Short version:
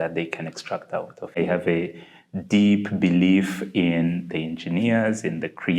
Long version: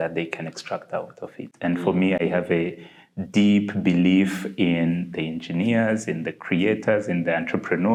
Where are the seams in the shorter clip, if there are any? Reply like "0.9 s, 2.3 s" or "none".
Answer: 1.4 s

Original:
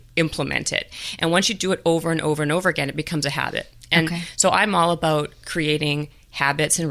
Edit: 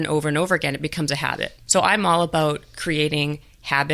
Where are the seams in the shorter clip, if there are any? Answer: 1.6 s

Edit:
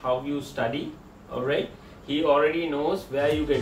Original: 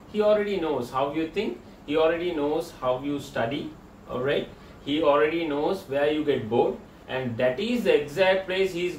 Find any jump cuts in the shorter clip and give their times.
none

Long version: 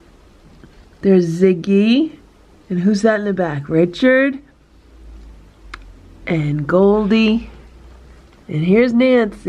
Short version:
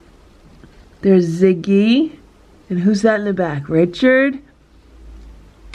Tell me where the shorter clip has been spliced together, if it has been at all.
none

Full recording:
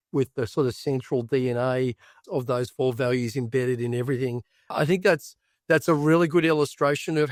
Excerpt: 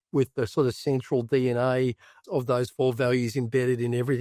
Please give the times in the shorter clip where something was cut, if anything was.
none

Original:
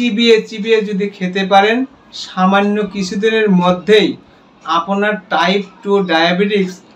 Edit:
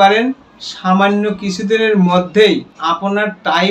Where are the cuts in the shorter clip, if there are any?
2.7 s

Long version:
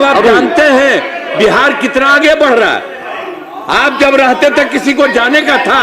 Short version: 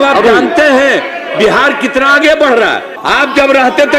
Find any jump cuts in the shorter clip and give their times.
2.9 s

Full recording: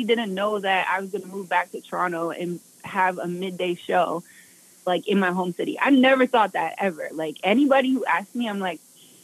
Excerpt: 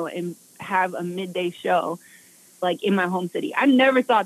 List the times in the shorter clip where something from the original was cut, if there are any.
none

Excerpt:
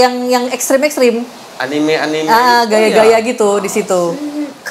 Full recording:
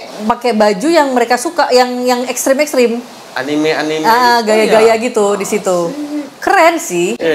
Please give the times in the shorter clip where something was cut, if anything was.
none

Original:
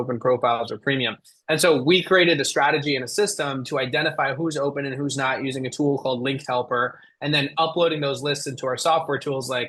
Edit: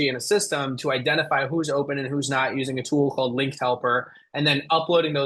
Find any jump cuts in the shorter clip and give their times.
none

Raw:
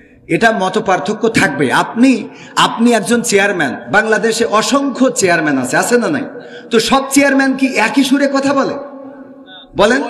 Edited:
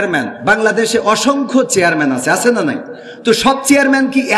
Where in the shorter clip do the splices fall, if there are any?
none

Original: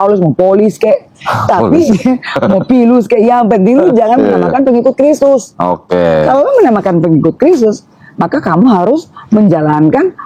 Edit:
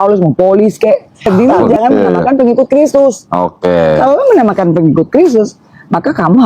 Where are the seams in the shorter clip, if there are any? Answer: 1.2 s

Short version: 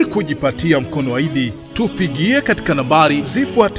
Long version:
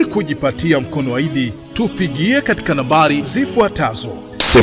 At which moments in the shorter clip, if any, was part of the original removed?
none

